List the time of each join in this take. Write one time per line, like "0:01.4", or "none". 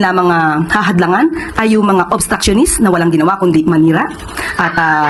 none